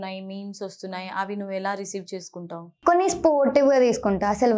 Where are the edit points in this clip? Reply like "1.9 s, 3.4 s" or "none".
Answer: 2.7 s